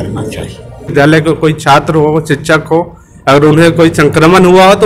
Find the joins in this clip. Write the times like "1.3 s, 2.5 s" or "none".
0.9 s